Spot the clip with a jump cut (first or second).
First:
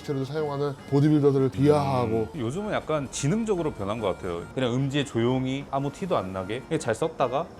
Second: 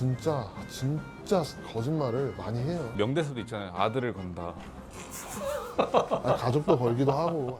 first